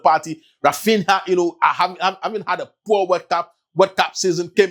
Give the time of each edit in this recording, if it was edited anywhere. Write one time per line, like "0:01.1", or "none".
none

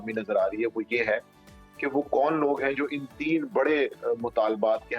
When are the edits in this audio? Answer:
none

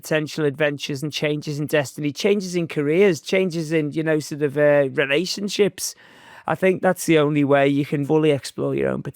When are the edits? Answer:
0:08.0

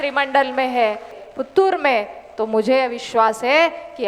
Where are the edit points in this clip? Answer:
0:01.2

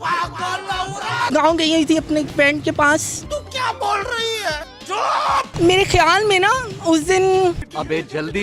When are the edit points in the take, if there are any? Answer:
0:01.2
0:02.3
0:05.5

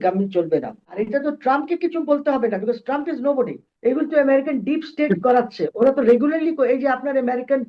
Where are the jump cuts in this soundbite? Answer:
0:01.0
0:03.6

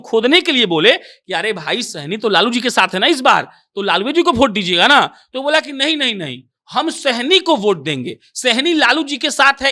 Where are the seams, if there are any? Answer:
none

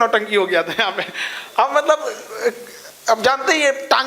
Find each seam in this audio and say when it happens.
none

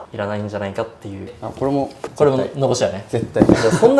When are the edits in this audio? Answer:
0:01.4

